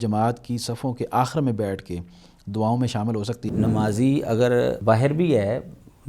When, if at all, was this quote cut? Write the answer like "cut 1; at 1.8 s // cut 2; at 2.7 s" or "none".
cut 1; at 3.5 s // cut 2; at 4.8 s

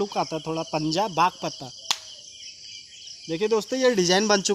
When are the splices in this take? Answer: cut 1; at 1.8 s

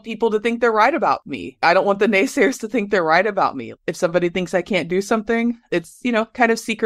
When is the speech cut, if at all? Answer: cut 1; at 1.6 s // cut 2; at 3.7 s // cut 3; at 5.7 s

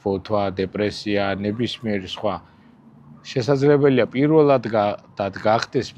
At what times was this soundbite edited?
none

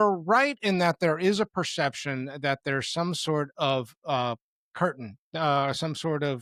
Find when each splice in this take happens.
none

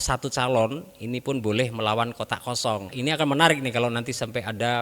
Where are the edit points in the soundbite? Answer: cut 1; at 2.9 s

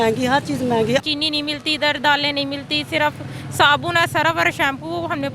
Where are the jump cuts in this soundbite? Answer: cut 1; at 1.0 s

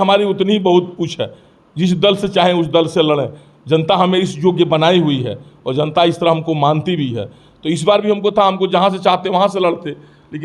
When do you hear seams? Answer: none

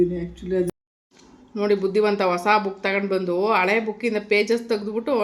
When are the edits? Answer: cut 1; at 1.0 s

